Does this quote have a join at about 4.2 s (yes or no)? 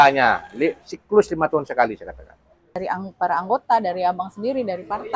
no